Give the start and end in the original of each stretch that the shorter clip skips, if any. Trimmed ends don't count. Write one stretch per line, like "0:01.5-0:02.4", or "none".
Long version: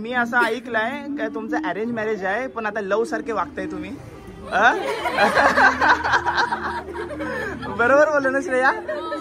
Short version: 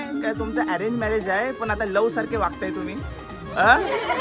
none